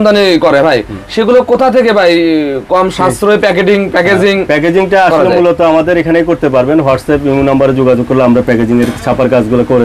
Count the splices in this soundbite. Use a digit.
0